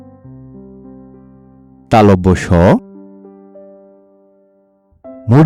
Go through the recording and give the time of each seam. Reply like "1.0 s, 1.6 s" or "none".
none